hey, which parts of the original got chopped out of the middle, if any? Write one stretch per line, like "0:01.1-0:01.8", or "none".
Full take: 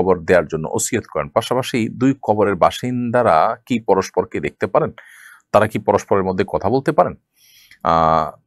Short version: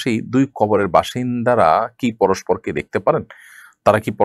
none